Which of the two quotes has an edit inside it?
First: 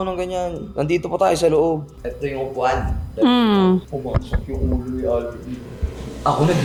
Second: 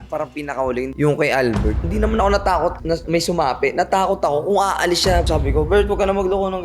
second; 3 cuts; at 0.9 s, 1.9 s, 5.3 s

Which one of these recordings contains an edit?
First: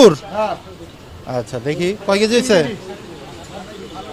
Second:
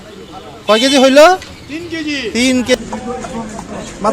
second; 1 cut; at 2.7 s

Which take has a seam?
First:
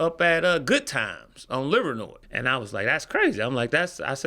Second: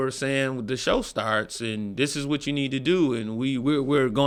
first; 1 cut; at 2.2 s

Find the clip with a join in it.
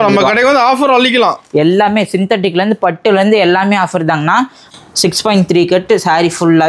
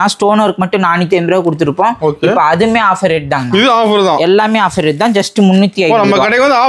first; 1 cut; at 4.6 s

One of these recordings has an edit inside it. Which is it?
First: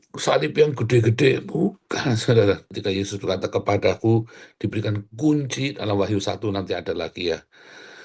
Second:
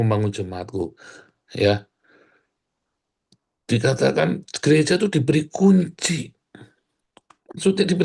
first; 1 cut; at 2.6 s

